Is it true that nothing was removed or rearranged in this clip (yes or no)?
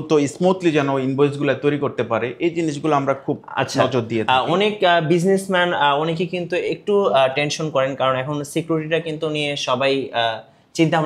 yes